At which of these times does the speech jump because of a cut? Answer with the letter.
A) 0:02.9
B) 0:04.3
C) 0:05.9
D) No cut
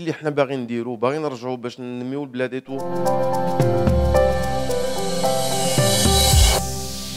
A